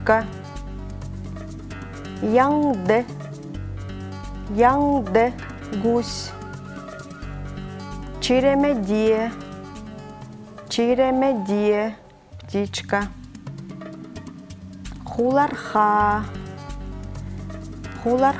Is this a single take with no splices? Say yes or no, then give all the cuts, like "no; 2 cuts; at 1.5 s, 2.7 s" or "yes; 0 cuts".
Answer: yes; 0 cuts